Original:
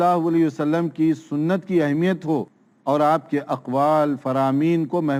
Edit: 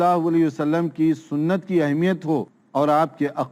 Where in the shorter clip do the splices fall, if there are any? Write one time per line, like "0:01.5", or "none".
0:02.6